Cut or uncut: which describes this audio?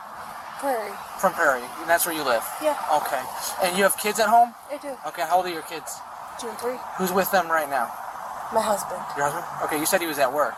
uncut